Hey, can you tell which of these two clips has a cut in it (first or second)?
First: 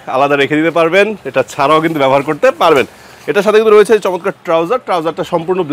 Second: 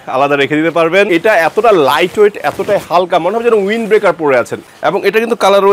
second